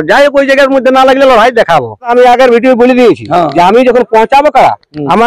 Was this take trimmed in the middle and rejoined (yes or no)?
yes